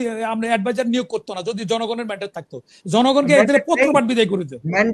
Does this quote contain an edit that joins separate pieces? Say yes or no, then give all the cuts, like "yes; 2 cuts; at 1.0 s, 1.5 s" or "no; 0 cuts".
no; 0 cuts